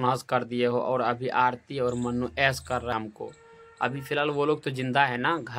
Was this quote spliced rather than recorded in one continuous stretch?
yes; 1 cut; at 2.9 s

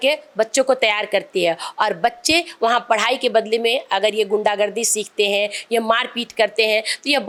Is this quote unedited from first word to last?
yes; 0 cuts

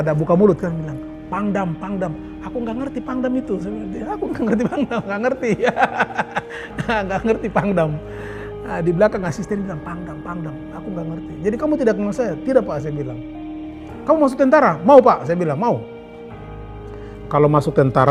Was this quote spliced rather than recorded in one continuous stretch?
no; 0 cuts

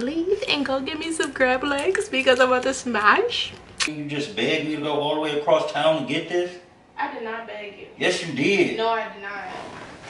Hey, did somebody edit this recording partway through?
yes; 1 cut; at 3.8 s

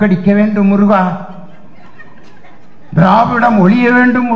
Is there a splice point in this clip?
no; 0 cuts

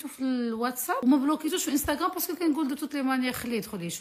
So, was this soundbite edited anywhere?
yes; 1 cut; at 1.0 s

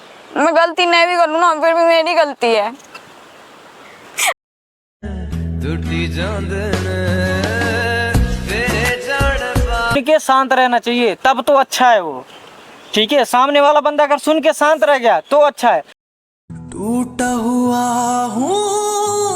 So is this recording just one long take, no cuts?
no; 3 cuts; at 4.7 s, 10.0 s, 16.4 s

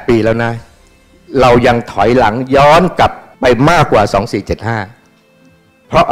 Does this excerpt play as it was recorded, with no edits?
no; 1 cut; at 3.3 s

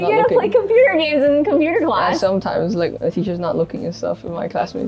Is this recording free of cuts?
yes; 0 cuts

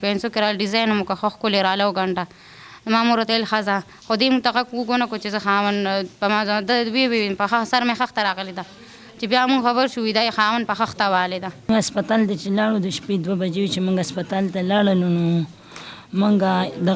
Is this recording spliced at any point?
yes; 1 cut; at 11.7 s

